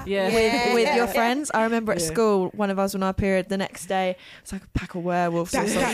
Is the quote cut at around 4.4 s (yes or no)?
no